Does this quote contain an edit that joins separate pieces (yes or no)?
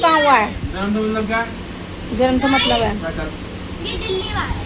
no